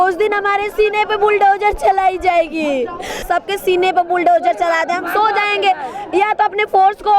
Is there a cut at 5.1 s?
no; 1 cut; at 3.3 s

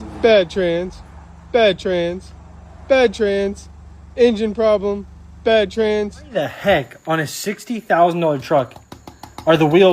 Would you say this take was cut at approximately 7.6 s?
no; 1 cut; at 6.2 s

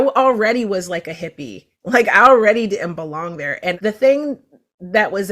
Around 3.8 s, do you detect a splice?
yes; 1 cut; at 3.8 s

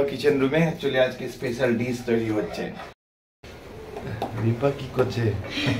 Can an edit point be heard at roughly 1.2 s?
no; 1 cut; at 2.8 s

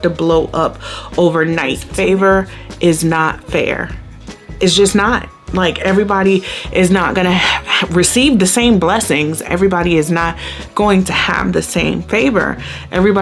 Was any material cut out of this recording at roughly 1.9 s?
yes; 1 cut; at 1.9 s

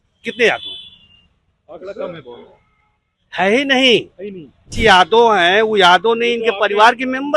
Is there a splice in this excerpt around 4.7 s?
yes; 1 cut; at 4.7 s

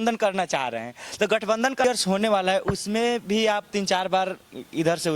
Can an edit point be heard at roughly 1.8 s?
yes; 1 cut; at 1.8 s

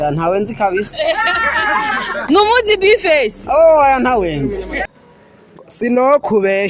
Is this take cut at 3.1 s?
no; 1 cut; at 4.9 s

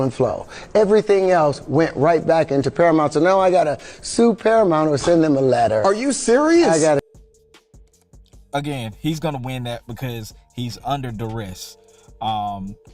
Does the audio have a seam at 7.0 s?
no; 0 cuts

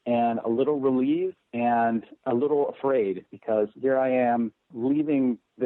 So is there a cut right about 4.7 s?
yes; 2 cuts; at 1.9 s, 4.7 s

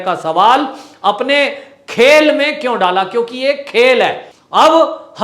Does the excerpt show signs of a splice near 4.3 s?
yes; 1 cut; at 4.3 s

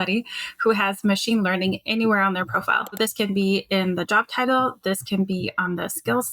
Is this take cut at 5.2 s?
no; 1 cut; at 3.0 s

